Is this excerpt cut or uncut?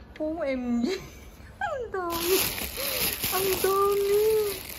uncut